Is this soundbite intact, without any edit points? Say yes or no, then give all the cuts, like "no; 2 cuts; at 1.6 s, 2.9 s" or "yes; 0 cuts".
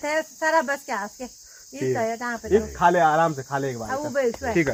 yes; 0 cuts